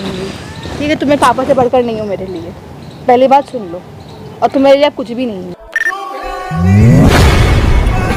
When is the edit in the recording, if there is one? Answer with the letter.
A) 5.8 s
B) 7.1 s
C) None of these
A